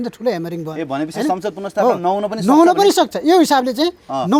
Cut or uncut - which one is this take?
uncut